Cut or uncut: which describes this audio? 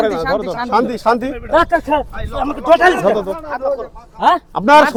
uncut